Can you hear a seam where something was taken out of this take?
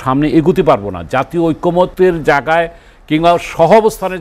yes; 1 cut; at 1.9 s

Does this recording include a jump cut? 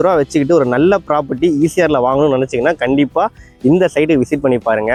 no; 0 cuts

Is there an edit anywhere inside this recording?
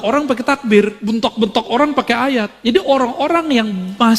yes; 2 cuts; at 1.0 s, 2.5 s

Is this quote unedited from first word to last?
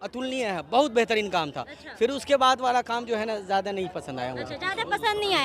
yes; 0 cuts

